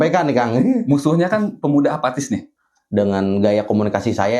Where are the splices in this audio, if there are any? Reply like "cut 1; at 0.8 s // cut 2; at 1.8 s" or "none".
cut 1; at 2.6 s

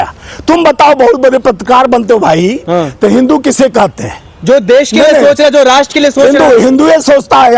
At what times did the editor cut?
none

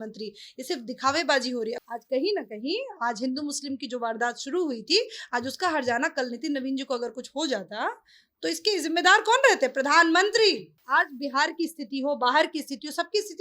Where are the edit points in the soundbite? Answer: cut 1; at 1.9 s // cut 2; at 10.7 s

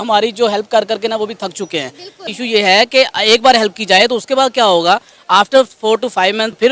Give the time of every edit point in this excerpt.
none

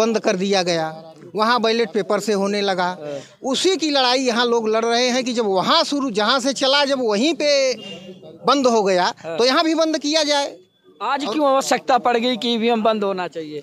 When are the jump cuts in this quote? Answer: none

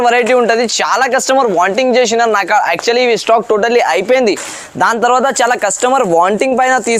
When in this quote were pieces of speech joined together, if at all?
none

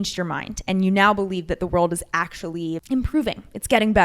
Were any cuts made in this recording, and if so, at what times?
cut 1; at 2.8 s

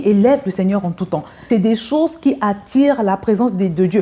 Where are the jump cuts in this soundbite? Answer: cut 1; at 1.3 s

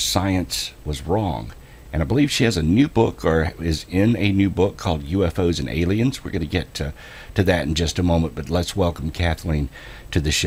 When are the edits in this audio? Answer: cut 1; at 7.5 s

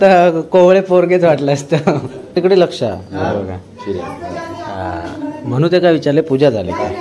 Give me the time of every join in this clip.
cut 1; at 2.3 s

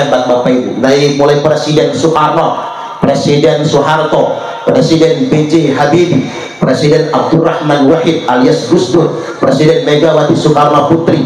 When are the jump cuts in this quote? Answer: none

